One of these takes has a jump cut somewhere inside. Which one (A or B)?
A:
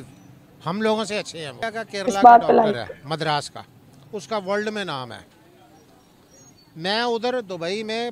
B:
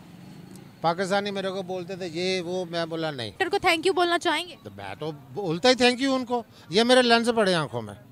B